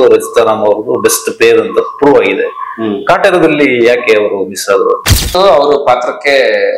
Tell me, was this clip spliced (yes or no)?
yes